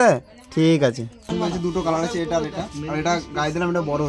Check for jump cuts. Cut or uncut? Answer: cut